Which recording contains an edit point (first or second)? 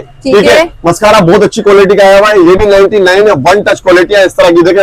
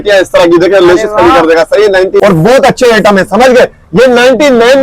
second